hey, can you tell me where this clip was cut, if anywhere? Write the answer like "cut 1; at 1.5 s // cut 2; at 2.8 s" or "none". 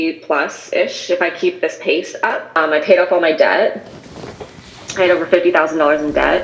cut 1; at 2.6 s